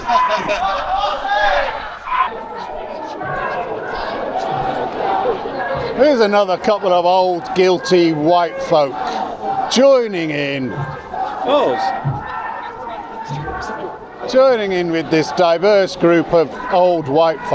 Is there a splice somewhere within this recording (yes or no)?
yes